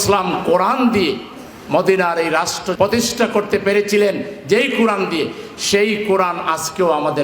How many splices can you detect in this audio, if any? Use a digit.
1